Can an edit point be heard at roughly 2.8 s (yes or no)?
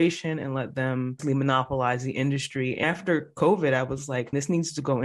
yes